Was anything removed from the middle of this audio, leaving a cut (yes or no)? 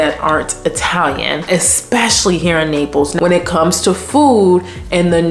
yes